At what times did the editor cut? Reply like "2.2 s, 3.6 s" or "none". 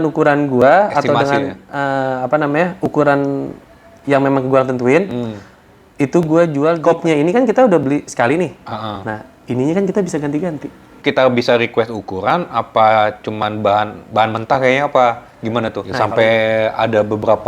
6.8 s, 11.0 s, 15.8 s

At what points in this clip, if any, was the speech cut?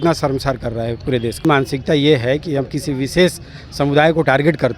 1.4 s

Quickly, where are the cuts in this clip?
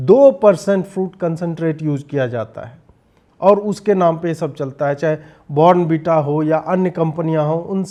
none

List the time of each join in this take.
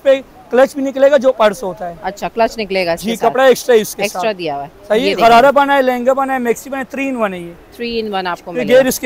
none

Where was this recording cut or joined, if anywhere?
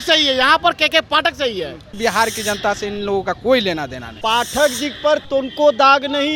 2.0 s, 4.1 s

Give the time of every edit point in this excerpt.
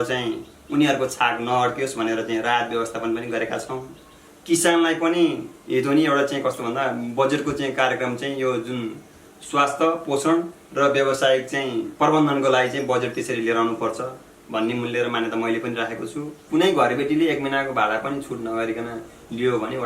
4.3 s, 16.4 s

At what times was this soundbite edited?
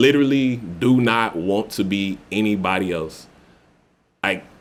none

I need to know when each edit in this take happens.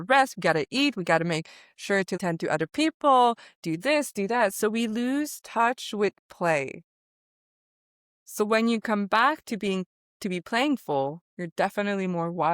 2.2 s

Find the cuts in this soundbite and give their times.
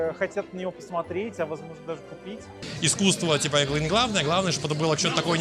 2.6 s

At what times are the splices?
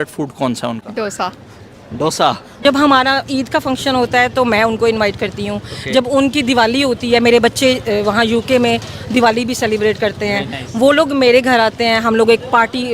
2.6 s

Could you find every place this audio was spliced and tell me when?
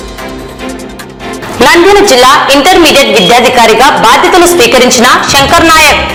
none

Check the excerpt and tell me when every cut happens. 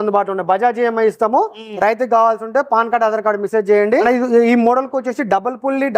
3.9 s

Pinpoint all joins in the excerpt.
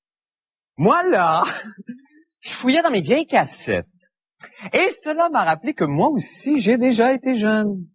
none

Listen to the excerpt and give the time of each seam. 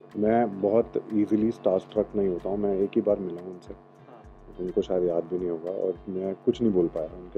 none

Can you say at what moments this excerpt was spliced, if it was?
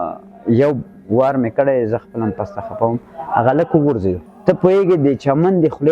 4.2 s

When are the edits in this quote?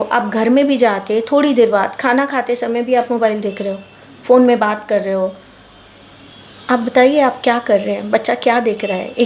none

